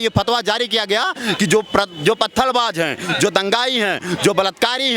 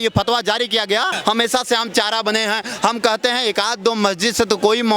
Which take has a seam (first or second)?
second